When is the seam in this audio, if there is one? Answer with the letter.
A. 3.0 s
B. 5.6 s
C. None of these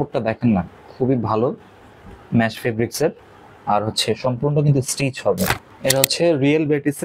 B